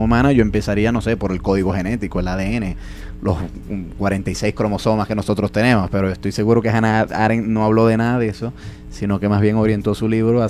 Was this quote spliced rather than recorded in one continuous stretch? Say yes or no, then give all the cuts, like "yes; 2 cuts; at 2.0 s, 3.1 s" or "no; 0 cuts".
yes; 1 cut; at 1.0 s